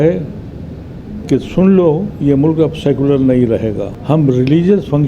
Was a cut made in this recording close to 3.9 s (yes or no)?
yes